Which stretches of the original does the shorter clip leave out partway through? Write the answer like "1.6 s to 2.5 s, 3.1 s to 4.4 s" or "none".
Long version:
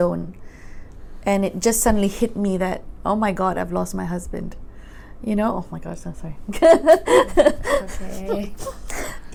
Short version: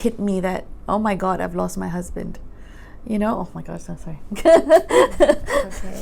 none